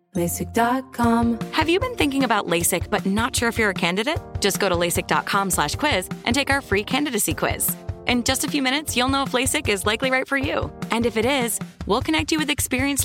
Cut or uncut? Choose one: cut